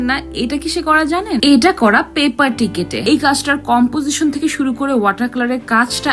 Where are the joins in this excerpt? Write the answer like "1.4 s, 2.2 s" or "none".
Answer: 1.4 s, 3.0 s